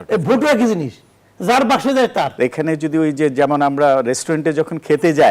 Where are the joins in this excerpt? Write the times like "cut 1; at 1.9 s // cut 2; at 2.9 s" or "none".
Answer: cut 1; at 2.3 s